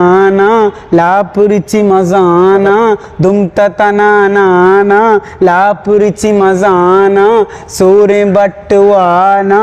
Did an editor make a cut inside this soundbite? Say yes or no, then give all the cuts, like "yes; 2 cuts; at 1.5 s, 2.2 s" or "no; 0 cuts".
no; 0 cuts